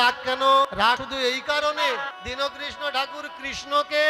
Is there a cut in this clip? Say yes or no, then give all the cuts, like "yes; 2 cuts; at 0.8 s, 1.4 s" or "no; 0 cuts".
yes; 2 cuts; at 1.0 s, 2.1 s